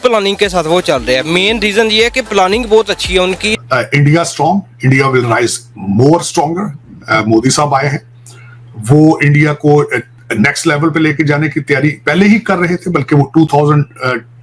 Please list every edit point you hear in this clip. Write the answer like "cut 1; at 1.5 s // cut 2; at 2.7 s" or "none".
cut 1; at 3.6 s

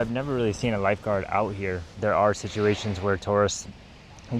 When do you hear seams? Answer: cut 1; at 1.9 s

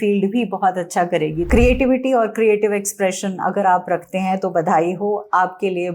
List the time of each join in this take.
cut 1; at 1.5 s

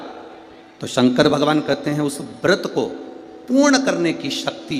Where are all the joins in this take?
none

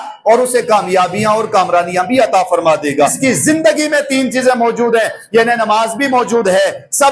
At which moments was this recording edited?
cut 1; at 3.2 s

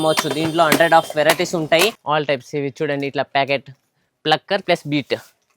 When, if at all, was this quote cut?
cut 1; at 2.0 s

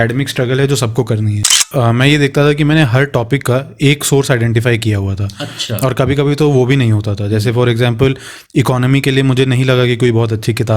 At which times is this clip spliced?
cut 1; at 1.6 s

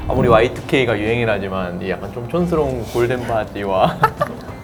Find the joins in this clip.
none

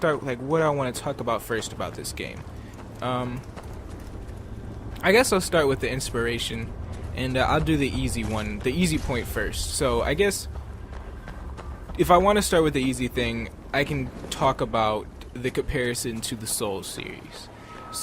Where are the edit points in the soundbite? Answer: cut 1; at 16.9 s

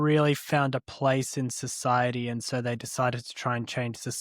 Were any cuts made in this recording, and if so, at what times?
none

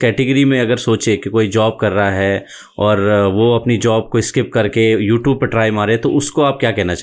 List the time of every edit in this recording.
none

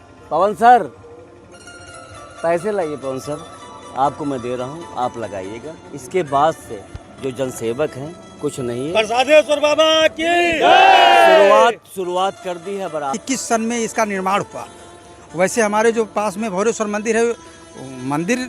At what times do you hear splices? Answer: cut 1; at 13.2 s

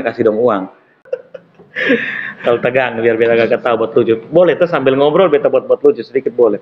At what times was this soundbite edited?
cut 1; at 1.2 s

